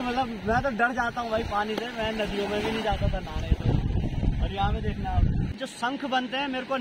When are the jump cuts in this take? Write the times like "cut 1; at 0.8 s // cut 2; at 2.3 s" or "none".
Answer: cut 1; at 5.6 s